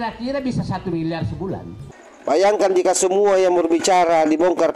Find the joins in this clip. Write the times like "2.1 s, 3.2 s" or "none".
1.8 s